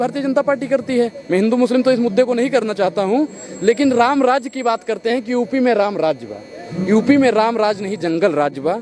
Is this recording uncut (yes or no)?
yes